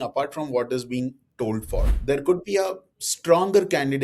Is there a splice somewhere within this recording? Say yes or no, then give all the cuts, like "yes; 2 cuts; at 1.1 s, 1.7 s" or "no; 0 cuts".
yes; 1 cut; at 1.9 s